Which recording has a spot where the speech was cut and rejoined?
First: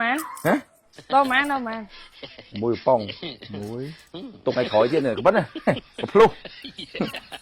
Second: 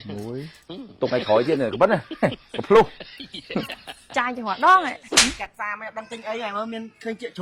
second; 1 cut; at 5.1 s

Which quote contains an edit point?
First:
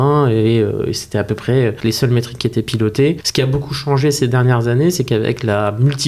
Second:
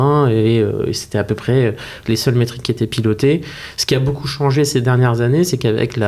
first; 2 cuts; at 1.8 s, 3.2 s

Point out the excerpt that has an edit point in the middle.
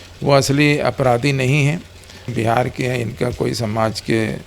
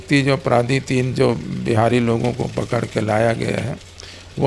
first; 1 cut; at 2.3 s

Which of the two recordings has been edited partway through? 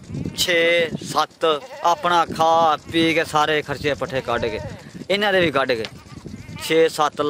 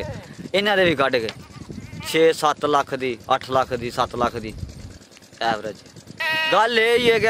second; 1 cut; at 6.1 s

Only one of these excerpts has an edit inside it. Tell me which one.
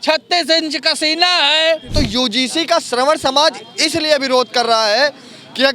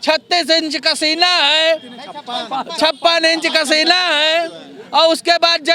first; 1 cut; at 1.9 s

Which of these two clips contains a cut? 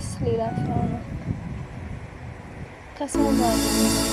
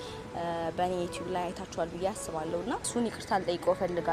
second; 1 cut; at 2.9 s

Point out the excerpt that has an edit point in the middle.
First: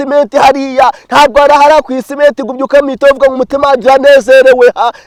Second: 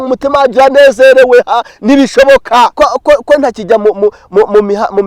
second; 1 cut; at 2.7 s

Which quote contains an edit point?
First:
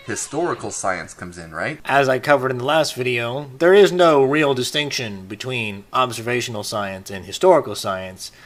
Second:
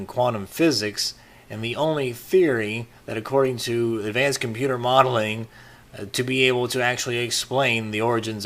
second; 1 cut; at 0.9 s

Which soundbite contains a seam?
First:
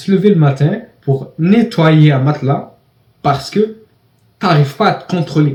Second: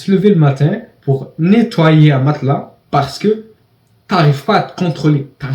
second; 1 cut; at 2.7 s

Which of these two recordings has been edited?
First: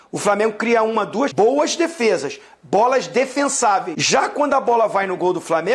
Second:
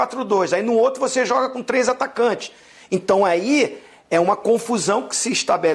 first; 2 cuts; at 1.3 s, 4.0 s

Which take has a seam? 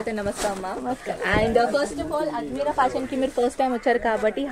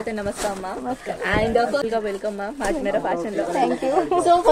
second; 1 cut; at 1.7 s

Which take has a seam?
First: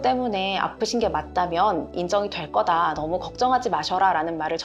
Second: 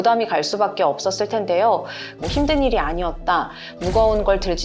second; 1 cut; at 2.2 s

